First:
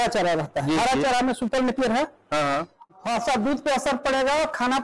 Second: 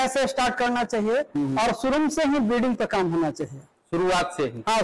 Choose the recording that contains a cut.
first; 1 cut; at 2.9 s

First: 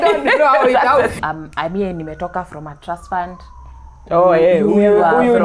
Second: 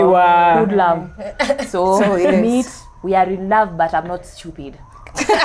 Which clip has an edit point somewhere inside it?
first; 1 cut; at 1.1 s

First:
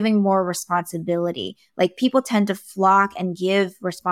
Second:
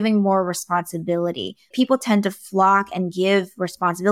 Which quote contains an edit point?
second; 1 cut; at 1.7 s

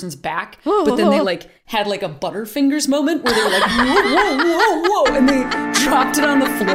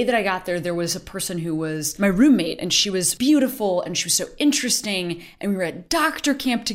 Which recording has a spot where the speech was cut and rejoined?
second; 2 cuts; at 1.9 s, 3.1 s

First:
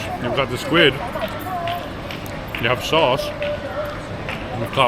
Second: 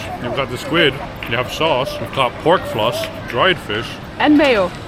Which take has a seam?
second; 3 cuts; at 1.0 s, 2.0 s, 3.2 s

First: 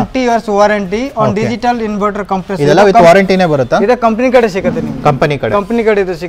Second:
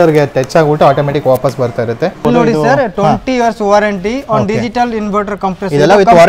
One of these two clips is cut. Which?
second; 1 cut; at 2.2 s

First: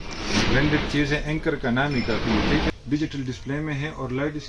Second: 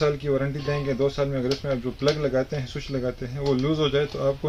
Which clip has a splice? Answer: first; 1 cut; at 2.7 s

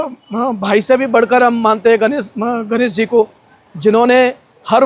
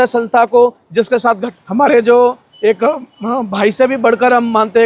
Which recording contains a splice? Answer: second; 1 cut; at 1.5 s

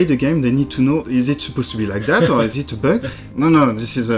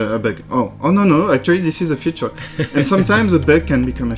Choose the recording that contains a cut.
first; 2 cuts; at 1.0 s, 3.0 s

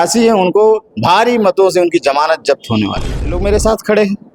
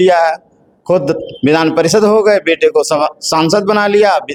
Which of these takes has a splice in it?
first; 1 cut; at 3.3 s

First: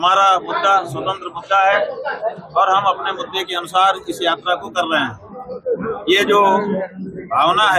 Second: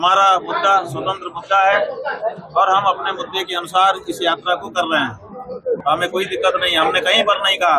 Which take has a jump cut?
second; 1 cut; at 5.8 s

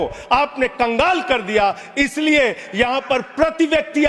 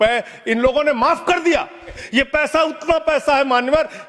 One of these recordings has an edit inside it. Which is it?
second; 1 cut; at 2.0 s

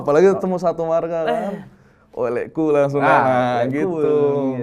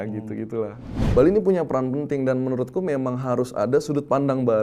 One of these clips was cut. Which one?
second; 1 cut; at 0.9 s

